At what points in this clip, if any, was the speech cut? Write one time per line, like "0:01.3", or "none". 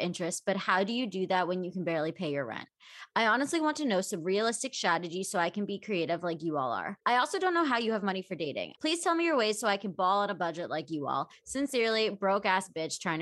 0:06.9
0:08.6